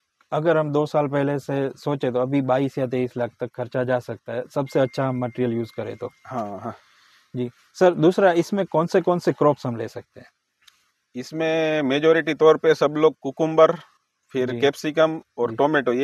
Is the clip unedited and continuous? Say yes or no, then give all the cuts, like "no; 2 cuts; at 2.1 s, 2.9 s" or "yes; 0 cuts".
yes; 0 cuts